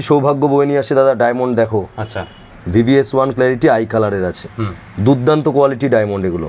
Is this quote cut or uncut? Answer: uncut